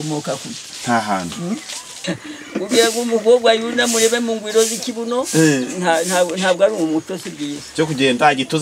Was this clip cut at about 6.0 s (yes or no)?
no